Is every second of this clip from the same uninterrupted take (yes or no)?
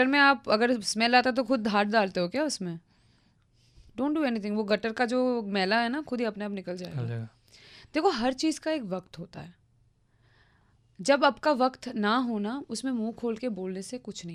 yes